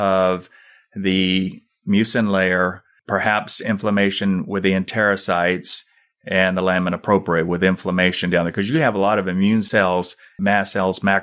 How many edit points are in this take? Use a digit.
2